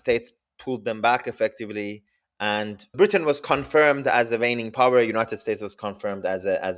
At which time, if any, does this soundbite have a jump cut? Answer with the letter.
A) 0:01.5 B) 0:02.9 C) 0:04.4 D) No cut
B